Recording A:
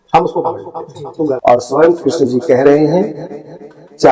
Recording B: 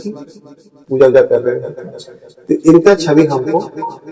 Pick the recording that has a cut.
A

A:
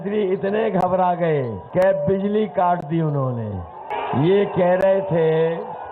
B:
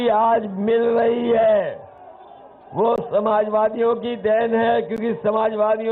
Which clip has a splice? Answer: A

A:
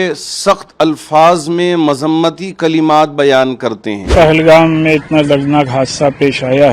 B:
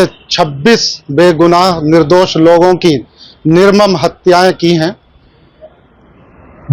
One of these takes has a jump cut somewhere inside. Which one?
A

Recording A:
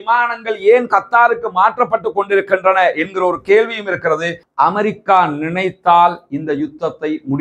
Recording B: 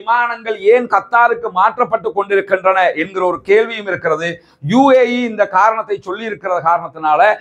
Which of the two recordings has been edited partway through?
A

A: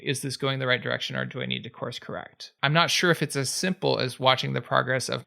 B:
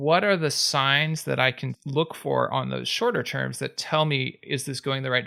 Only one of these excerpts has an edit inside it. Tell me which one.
A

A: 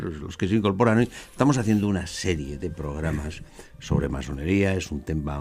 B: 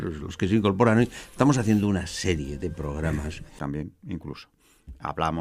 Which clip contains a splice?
A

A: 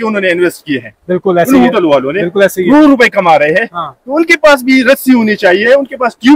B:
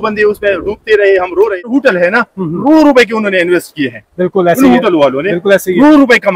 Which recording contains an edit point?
B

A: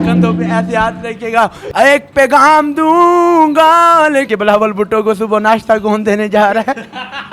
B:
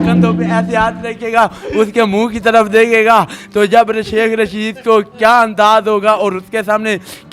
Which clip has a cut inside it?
A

